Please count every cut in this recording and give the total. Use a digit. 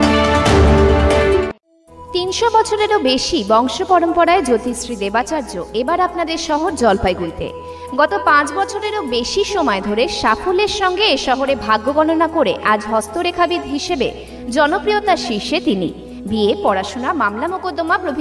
1